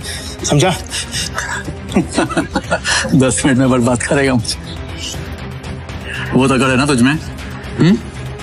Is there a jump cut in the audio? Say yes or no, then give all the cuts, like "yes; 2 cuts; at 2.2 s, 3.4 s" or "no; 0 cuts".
no; 0 cuts